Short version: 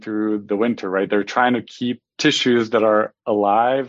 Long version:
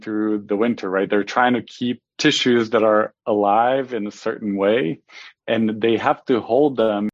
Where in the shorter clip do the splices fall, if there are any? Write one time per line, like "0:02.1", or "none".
none